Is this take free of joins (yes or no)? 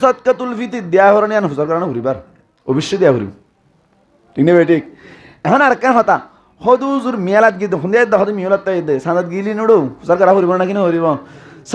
yes